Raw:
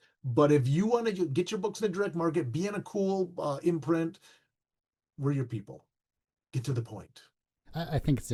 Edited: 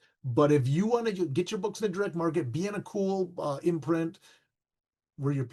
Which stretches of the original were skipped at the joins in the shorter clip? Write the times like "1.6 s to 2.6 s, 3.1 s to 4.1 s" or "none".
none